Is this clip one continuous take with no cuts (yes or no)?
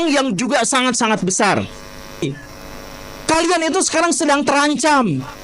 no